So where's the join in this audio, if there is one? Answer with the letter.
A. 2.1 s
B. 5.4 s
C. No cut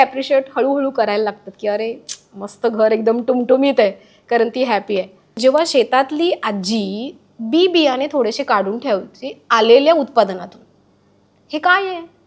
B